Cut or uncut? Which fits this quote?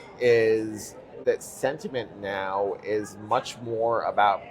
cut